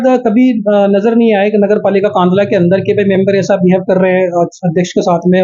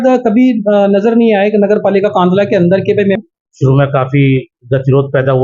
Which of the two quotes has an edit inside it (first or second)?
second